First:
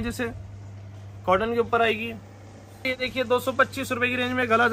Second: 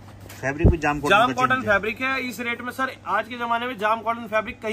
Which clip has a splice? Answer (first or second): first